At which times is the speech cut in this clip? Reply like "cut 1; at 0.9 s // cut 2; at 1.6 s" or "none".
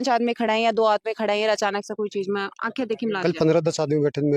none